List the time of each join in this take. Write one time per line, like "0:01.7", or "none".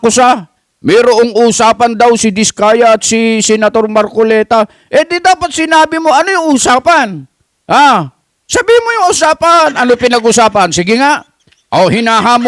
none

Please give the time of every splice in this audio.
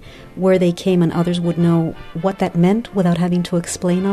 0:02.0

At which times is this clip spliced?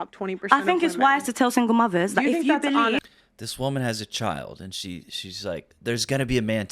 0:05.7

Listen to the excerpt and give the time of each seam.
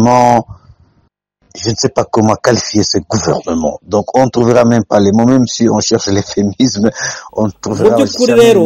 0:07.7

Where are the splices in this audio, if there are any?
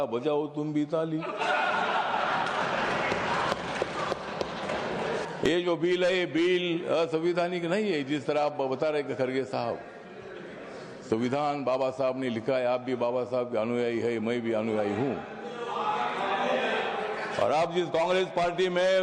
0:05.2

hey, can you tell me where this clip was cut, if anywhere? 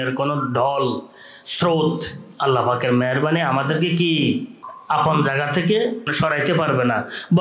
0:04.7
0:06.1

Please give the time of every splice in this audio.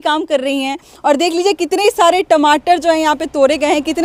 none

